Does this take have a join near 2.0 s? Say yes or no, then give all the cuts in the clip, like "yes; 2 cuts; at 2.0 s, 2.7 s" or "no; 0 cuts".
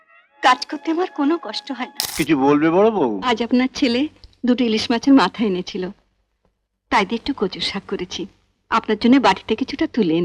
yes; 1 cut; at 2.0 s